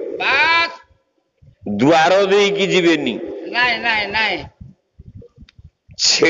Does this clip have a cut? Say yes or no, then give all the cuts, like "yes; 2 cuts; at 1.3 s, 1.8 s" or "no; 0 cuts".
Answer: no; 0 cuts